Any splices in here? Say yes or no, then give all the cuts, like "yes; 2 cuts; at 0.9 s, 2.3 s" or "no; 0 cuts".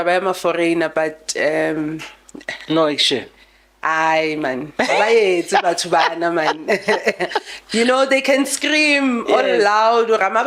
no; 0 cuts